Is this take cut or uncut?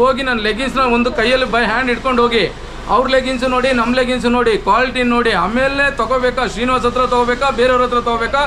uncut